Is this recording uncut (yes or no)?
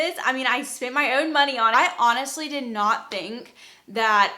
no